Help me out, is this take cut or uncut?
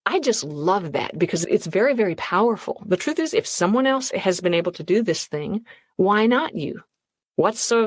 cut